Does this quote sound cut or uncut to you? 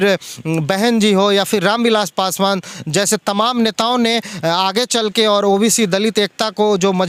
uncut